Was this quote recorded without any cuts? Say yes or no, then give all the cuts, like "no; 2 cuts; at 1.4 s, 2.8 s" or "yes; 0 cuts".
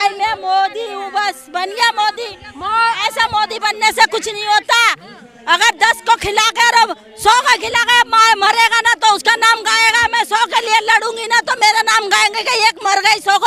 yes; 0 cuts